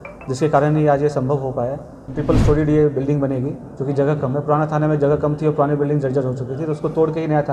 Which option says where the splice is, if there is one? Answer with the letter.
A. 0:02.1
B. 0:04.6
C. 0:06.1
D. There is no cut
A